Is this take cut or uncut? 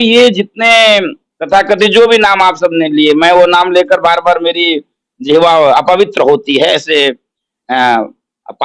uncut